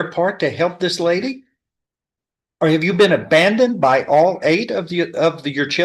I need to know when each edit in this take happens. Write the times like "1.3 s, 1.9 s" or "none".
none